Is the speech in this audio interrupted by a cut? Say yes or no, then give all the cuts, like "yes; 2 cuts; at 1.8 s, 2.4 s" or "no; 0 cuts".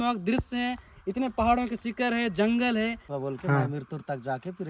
yes; 1 cut; at 3.1 s